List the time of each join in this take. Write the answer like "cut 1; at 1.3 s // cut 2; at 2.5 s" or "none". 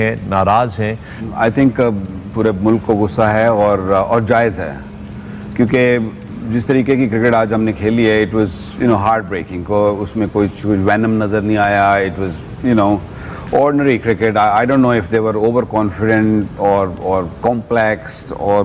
cut 1; at 1.2 s

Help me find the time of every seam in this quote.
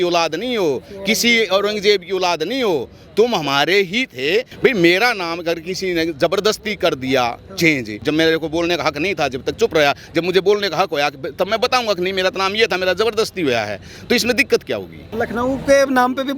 cut 1; at 4.5 s // cut 2; at 7.9 s // cut 3; at 15.0 s

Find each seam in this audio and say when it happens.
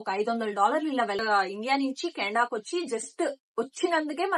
cut 1; at 1.2 s

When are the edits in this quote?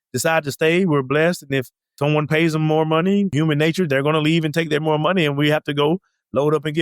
cut 1; at 1.9 s // cut 2; at 3.3 s

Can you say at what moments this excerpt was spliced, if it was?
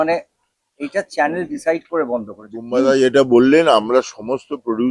cut 1; at 2.7 s

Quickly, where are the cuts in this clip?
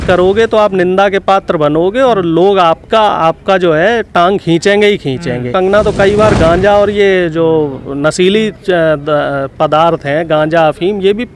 cut 1; at 5.5 s

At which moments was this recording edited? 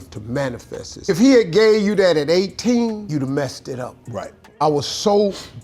cut 1; at 1.1 s // cut 2; at 4.4 s

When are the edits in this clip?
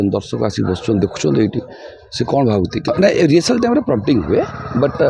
cut 1; at 2.9 s

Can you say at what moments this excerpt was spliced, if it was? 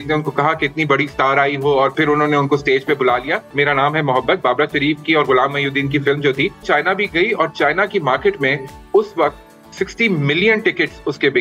cut 1; at 1.9 s // cut 2; at 3.5 s // cut 3; at 6.6 s

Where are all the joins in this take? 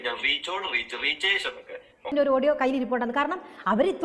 cut 1; at 2.1 s

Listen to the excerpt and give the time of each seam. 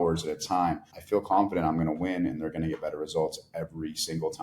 cut 1; at 0.9 s

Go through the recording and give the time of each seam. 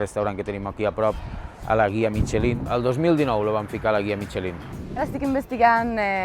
cut 1; at 2.6 s // cut 2; at 5.0 s

